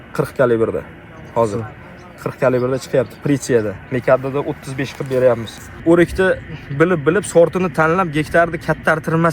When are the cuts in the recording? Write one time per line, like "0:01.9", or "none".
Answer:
0:05.8